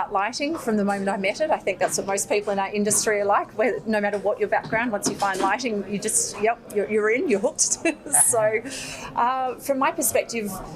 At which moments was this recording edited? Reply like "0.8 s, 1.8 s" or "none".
none